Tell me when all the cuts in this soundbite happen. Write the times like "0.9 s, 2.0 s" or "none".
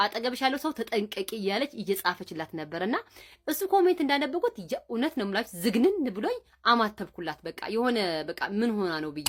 none